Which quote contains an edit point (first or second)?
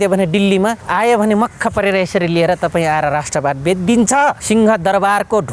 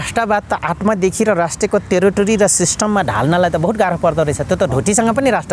first